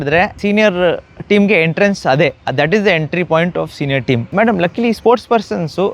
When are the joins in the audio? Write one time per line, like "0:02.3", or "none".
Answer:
0:04.3